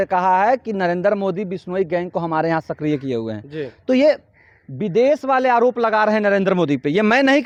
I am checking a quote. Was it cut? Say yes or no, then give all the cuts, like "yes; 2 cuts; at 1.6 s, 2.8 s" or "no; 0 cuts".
no; 0 cuts